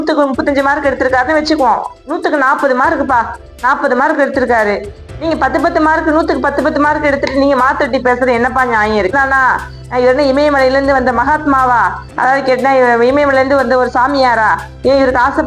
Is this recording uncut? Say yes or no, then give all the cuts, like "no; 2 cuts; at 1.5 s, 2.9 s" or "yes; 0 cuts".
no; 1 cut; at 9.1 s